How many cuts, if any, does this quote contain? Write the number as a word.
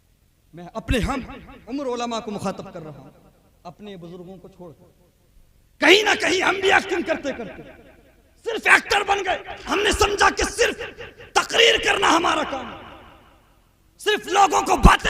one